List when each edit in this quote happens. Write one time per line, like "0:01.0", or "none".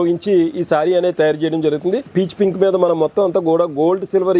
0:02.0